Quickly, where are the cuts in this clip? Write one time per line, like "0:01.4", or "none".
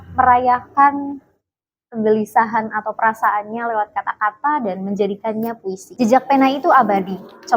0:05.9